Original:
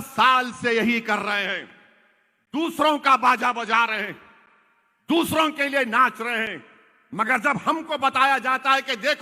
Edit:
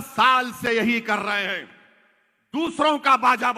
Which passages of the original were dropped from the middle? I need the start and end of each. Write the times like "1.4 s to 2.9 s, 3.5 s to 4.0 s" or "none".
none